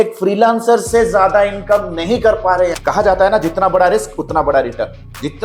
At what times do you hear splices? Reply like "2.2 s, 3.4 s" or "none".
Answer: 2.7 s

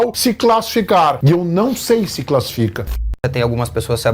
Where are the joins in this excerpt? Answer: 3.1 s

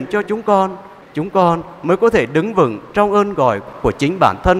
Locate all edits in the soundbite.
none

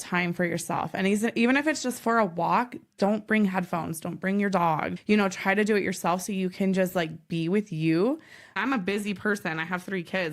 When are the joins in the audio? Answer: 4.9 s, 8.6 s

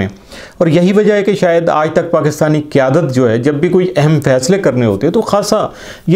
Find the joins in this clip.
none

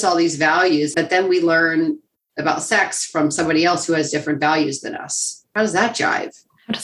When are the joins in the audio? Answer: 0.9 s

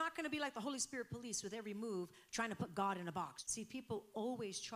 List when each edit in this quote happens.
3.4 s

